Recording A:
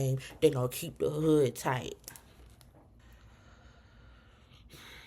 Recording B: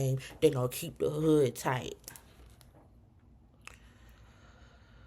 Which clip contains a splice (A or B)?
A